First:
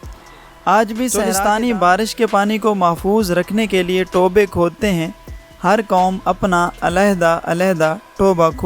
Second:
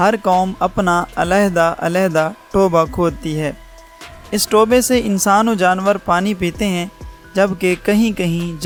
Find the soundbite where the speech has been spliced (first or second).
first